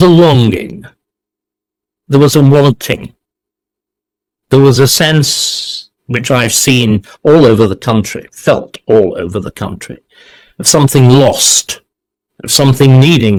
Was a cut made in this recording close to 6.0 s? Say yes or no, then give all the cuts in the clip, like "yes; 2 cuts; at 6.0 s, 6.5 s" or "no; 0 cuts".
no; 0 cuts